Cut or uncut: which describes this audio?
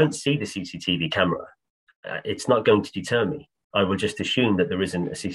uncut